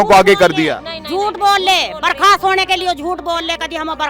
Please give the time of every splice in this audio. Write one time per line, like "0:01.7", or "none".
none